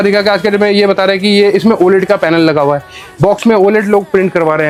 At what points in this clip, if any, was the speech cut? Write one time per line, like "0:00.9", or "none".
none